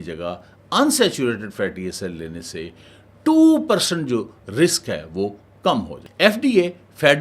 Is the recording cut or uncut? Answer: cut